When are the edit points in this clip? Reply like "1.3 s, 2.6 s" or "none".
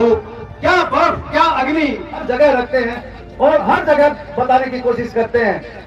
2.2 s